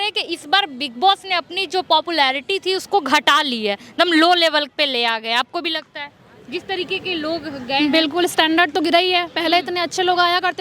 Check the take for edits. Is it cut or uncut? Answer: uncut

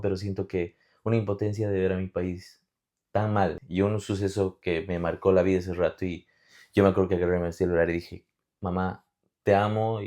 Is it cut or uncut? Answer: cut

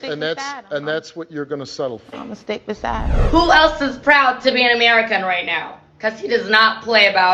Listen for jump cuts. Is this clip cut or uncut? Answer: cut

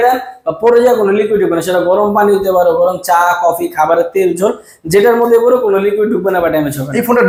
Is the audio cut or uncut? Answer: uncut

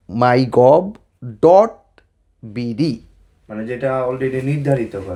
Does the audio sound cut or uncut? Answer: uncut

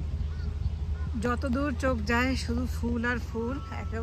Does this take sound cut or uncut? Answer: uncut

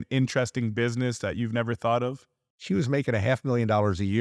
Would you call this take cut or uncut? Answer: cut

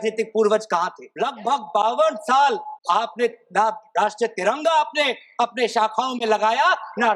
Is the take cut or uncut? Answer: cut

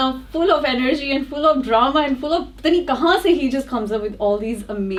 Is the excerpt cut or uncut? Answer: uncut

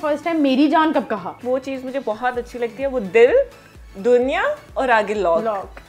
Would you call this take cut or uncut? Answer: cut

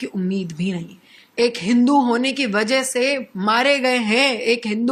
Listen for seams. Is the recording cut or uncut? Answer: cut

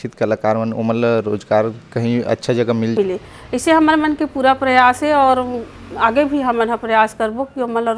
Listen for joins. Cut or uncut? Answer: cut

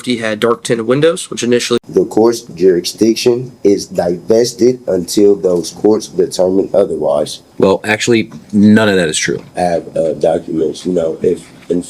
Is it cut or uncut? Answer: cut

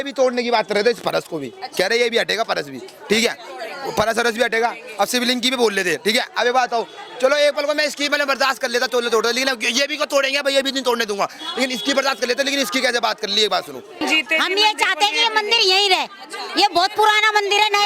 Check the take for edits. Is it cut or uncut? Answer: cut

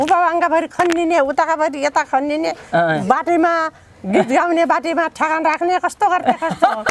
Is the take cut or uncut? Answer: uncut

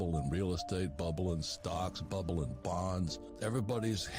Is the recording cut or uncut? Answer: cut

